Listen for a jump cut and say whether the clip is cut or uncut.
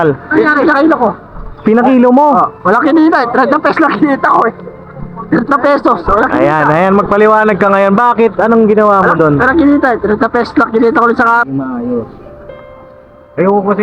cut